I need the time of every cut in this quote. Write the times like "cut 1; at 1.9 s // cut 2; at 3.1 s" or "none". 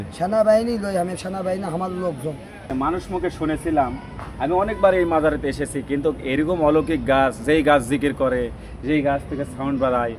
cut 1; at 2.7 s